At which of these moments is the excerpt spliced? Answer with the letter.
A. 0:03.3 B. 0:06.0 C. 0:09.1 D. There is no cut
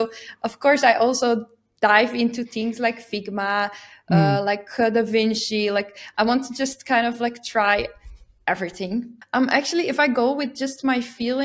C